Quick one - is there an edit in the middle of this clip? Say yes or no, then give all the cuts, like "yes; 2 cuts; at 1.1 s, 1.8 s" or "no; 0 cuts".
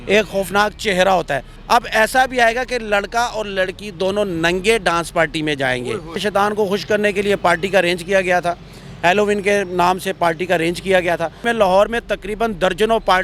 yes; 3 cuts; at 1.5 s, 6.2 s, 11.4 s